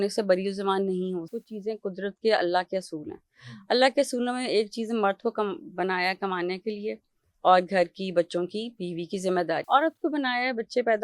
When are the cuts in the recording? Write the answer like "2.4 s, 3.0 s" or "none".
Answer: 1.3 s, 9.6 s